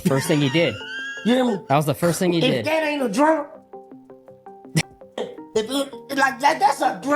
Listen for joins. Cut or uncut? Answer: cut